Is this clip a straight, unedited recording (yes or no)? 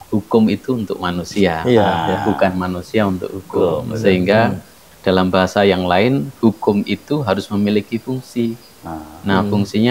yes